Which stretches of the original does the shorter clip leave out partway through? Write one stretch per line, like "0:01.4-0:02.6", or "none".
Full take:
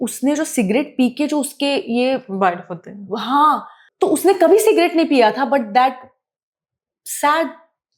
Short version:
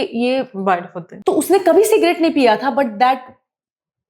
0:02.8-0:03.8